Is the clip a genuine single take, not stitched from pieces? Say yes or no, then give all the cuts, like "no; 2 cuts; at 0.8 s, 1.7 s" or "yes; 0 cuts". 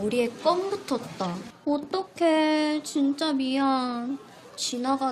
no; 1 cut; at 1.5 s